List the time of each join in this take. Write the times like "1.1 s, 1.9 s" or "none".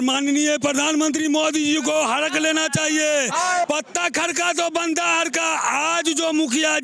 3.6 s